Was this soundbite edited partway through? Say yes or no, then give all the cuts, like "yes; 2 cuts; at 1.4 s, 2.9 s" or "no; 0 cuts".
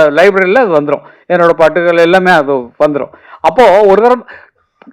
no; 0 cuts